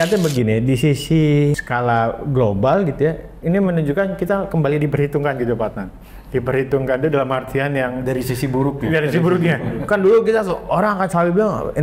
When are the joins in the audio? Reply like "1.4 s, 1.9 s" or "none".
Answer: 1.6 s

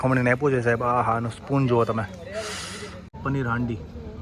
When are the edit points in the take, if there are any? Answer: 3.2 s

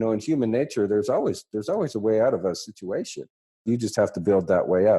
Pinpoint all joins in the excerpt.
3.6 s

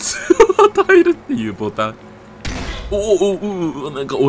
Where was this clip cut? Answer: none

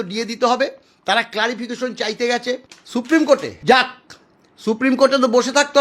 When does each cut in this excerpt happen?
2.7 s, 3.5 s

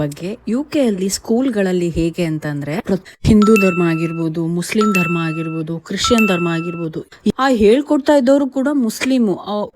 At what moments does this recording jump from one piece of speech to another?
3.0 s, 7.3 s

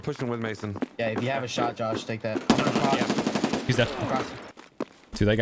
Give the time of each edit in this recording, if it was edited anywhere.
4.5 s

